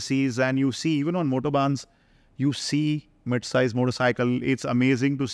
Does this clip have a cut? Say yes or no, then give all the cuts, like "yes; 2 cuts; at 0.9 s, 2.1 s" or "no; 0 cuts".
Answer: no; 0 cuts